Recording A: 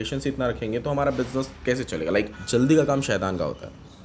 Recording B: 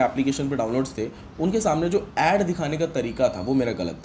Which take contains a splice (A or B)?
A